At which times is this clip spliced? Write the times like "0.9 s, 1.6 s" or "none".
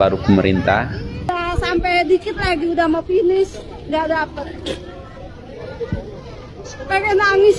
1.1 s